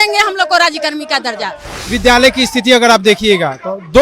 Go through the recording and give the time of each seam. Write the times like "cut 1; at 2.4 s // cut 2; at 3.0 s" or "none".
cut 1; at 1.9 s